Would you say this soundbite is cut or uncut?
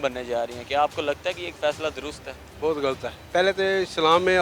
cut